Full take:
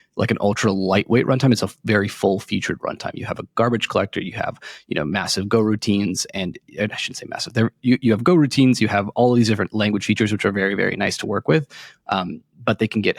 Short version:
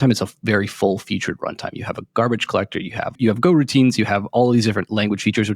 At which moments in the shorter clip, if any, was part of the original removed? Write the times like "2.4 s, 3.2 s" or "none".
3.2 s